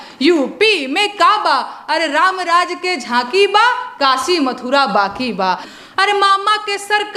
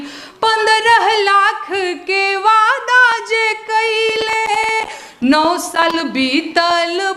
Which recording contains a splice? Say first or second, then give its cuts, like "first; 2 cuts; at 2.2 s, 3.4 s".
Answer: first; 1 cut; at 5.7 s